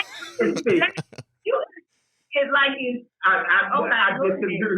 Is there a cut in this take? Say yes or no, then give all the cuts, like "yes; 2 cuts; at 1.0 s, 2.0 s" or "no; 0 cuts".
no; 0 cuts